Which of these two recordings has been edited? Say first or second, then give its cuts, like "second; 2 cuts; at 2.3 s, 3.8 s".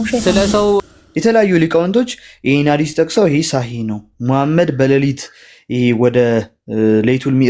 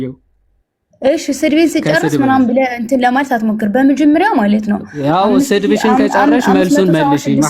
first; 1 cut; at 0.9 s